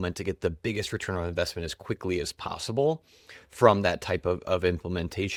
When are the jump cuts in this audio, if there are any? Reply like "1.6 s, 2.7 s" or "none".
none